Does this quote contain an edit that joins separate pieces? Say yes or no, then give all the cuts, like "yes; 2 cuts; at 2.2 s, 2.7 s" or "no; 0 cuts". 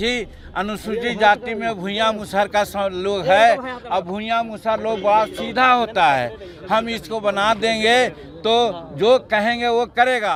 no; 0 cuts